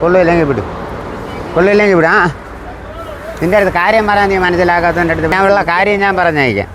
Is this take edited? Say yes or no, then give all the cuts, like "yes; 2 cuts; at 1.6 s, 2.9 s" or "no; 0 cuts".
yes; 1 cut; at 5.3 s